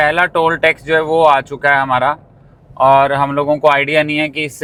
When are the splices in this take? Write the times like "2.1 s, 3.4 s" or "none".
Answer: none